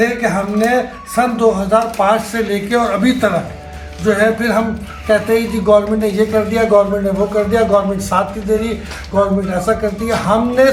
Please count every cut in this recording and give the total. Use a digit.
0